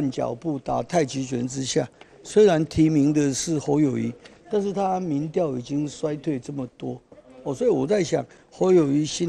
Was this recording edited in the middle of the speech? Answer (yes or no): no